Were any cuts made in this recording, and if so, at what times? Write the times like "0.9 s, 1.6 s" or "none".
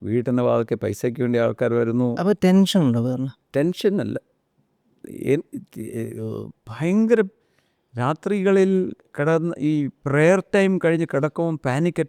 none

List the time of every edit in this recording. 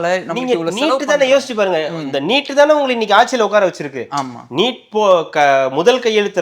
none

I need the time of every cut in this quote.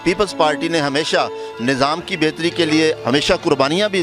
3.0 s

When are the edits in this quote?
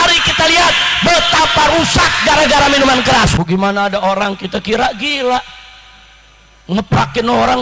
3.3 s

